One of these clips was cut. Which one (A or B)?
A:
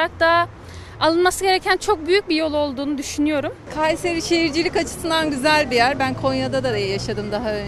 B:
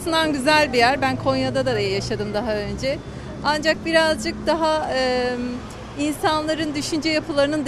A